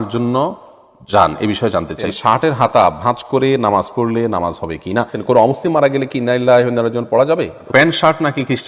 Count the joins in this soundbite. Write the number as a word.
three